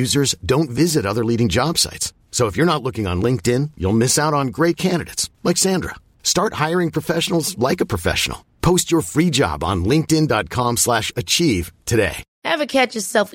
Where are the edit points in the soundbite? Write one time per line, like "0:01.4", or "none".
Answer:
0:12.3